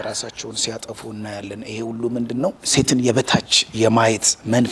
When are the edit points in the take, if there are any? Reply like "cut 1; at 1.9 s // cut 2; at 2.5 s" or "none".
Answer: cut 1; at 2.6 s